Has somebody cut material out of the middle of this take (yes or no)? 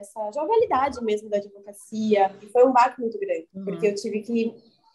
yes